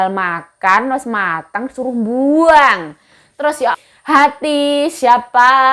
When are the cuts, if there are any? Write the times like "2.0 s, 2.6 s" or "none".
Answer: 3.7 s

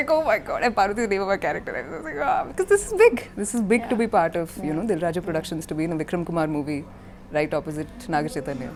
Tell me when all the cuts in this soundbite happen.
none

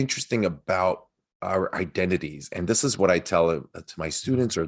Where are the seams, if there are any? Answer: none

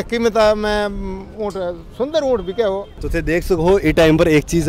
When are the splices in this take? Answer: none

